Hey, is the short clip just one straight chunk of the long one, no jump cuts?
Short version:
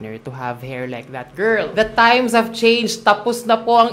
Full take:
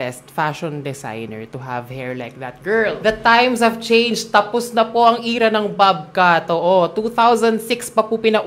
yes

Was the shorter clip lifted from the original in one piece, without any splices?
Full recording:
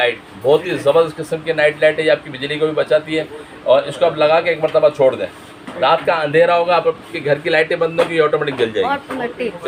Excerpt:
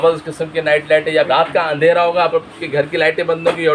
no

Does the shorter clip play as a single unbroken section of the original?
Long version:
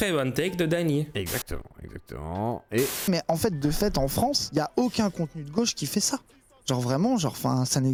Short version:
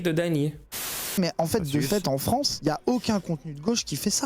no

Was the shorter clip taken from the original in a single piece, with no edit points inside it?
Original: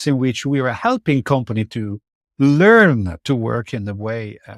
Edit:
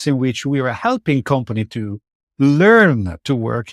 yes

